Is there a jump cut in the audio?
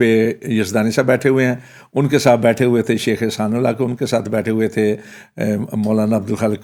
no; 0 cuts

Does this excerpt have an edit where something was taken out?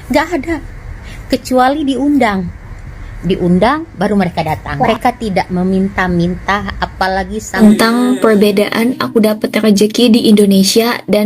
yes; 2 cuts; at 4.9 s, 7.5 s

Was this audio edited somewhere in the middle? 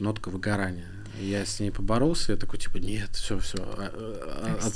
no; 0 cuts

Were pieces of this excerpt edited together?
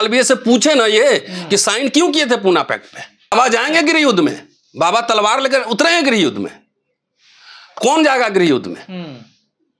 yes; 1 cut; at 3.3 s

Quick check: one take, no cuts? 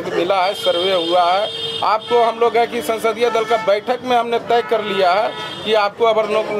yes; 0 cuts

